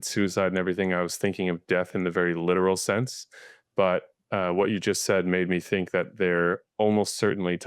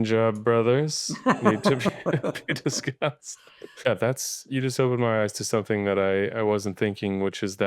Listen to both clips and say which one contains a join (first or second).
second